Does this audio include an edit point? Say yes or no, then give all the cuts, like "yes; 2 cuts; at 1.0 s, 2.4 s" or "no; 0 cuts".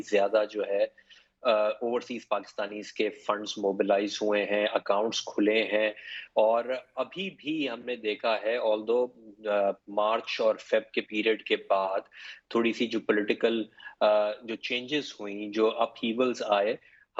no; 0 cuts